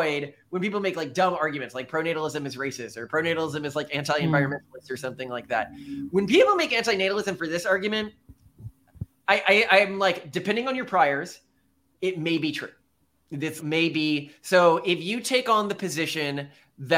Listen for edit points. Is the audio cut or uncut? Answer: uncut